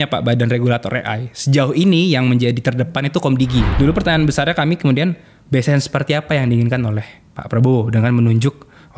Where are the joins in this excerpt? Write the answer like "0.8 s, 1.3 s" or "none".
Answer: 3.7 s